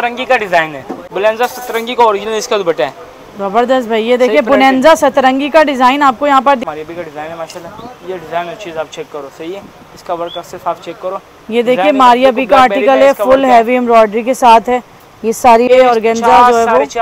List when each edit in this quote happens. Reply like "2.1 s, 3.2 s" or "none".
1.0 s, 6.6 s, 15.7 s